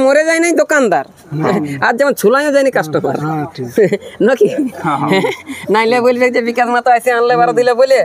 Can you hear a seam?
no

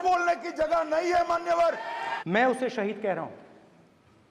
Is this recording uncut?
no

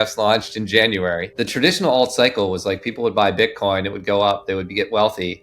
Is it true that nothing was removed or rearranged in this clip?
no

